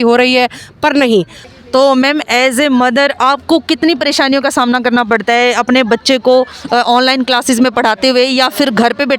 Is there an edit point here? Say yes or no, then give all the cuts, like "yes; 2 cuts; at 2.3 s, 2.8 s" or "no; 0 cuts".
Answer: yes; 1 cut; at 1.4 s